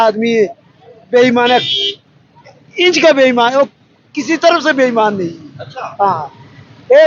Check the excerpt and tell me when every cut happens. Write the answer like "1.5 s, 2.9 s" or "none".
none